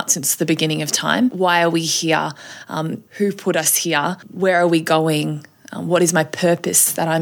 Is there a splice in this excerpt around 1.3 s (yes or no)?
yes